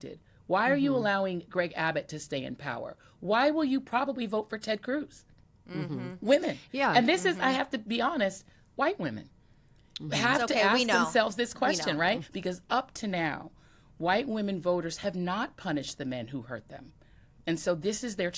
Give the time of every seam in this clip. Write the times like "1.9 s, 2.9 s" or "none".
12.3 s